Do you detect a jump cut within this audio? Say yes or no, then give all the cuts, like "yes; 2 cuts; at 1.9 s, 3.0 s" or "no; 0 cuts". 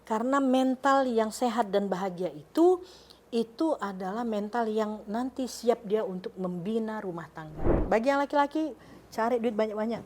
yes; 1 cut; at 7.7 s